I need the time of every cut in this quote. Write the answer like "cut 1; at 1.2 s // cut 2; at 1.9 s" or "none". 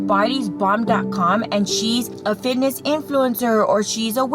cut 1; at 2.1 s